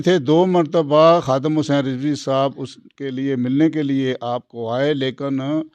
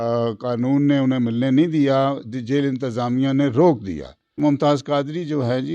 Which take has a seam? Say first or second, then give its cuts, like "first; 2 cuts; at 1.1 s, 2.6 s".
second; 1 cut; at 4.4 s